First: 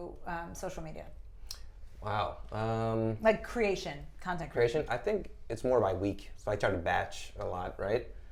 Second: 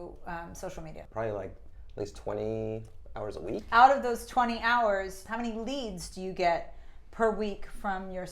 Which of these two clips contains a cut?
second; 3 cuts; at 1.0 s, 3.6 s, 5.2 s

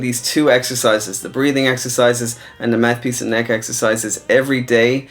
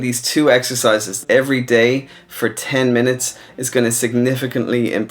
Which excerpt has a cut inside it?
second; 1 cut; at 1.1 s

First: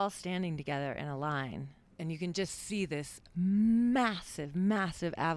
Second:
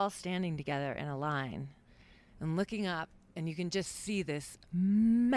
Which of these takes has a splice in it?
first; 1 cut; at 1.8 s

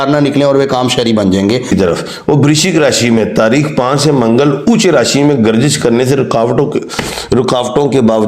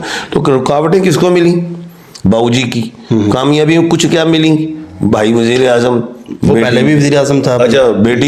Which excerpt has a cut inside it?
first; 1 cut; at 1.7 s

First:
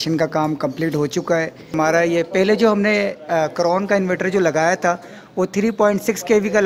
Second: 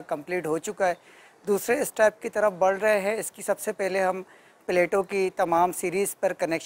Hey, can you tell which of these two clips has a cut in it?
first; 1 cut; at 1.6 s

